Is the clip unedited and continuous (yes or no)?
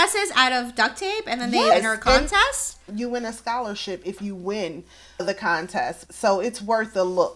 no